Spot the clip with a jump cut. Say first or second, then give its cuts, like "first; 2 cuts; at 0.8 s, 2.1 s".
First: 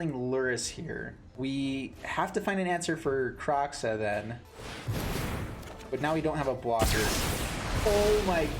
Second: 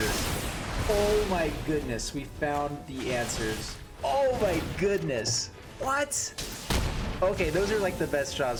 first; 2 cuts; at 1.2 s, 4.5 s